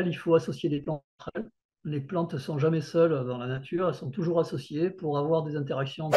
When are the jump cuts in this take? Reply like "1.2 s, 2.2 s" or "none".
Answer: none

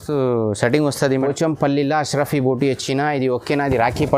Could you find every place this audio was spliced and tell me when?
1.2 s

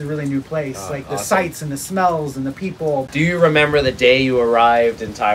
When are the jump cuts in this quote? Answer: 3.1 s

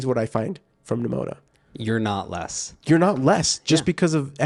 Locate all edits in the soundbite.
none

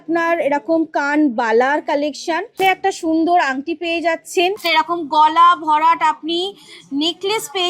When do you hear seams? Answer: 2.6 s, 4.6 s

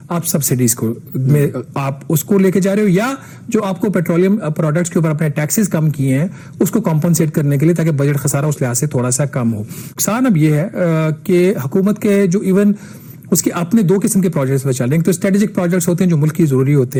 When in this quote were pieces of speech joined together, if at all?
none

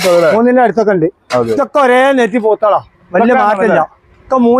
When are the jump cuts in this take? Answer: 1.5 s

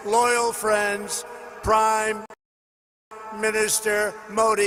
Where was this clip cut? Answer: none

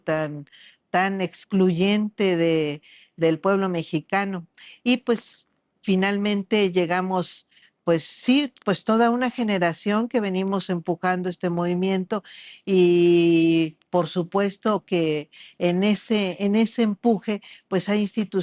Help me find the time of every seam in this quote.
none

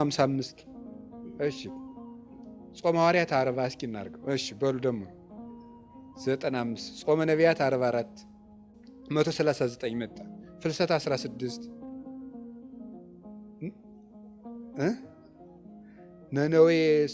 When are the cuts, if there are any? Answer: none

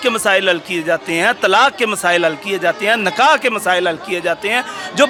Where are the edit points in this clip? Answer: none

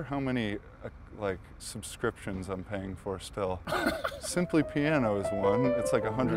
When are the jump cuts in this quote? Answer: 3.6 s

